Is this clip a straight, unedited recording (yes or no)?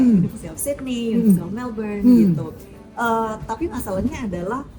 yes